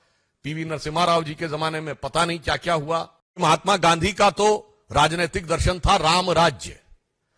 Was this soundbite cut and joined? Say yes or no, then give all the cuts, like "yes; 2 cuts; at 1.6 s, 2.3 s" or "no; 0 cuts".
yes; 1 cut; at 3.4 s